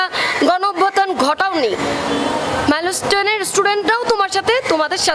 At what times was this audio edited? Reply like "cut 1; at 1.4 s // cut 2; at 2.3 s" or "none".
none